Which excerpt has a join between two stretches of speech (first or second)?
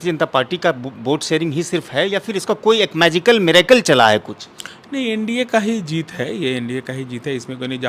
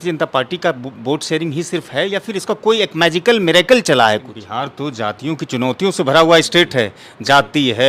second